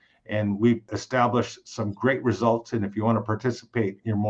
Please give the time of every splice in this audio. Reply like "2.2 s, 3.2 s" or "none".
0.9 s